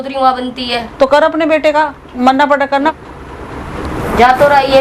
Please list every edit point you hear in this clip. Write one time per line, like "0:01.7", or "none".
0:02.9